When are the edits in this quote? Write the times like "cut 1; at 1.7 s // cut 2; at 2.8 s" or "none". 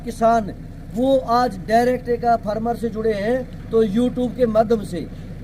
none